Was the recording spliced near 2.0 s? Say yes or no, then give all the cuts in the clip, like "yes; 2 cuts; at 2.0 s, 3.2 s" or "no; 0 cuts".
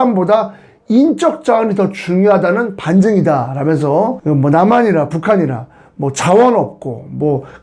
no; 1 cut; at 4.2 s